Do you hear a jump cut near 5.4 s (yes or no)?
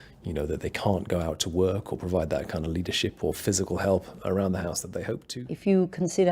yes